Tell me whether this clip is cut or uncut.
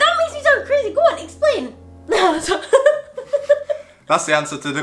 uncut